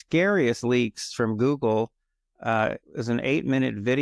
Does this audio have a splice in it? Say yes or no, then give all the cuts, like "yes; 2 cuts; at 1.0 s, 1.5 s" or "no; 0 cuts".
no; 0 cuts